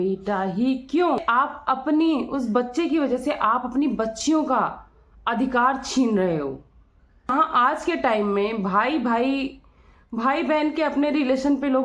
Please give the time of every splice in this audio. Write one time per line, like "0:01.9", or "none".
0:01.2
0:07.3